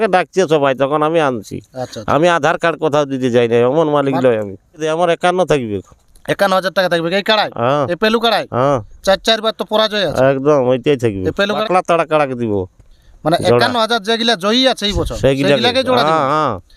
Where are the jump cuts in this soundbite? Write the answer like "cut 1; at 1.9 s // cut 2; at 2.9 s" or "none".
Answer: cut 1; at 4.8 s // cut 2; at 11.6 s